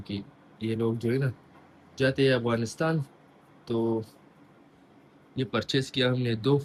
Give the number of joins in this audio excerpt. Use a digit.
0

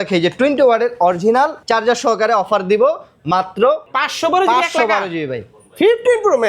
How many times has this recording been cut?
2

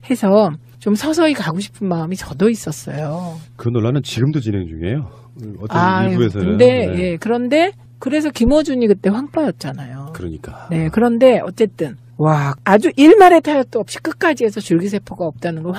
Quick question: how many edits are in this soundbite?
1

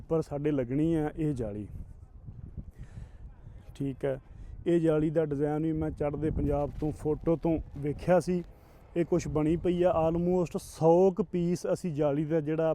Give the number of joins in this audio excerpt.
0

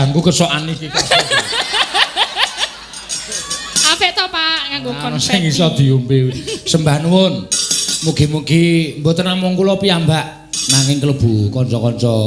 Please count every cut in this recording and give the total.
0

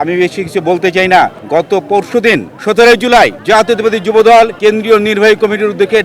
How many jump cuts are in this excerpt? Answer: 2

